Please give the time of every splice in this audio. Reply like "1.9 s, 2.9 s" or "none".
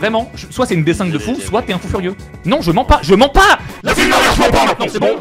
none